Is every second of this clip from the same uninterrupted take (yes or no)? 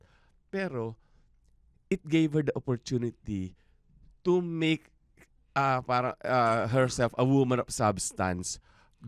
yes